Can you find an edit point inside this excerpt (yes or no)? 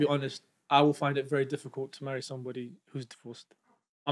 no